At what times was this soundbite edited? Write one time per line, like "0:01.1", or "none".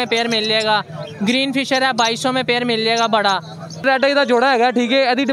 0:03.8